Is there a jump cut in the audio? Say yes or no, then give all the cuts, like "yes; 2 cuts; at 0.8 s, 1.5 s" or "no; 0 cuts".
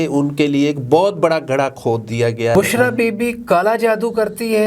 yes; 1 cut; at 2.5 s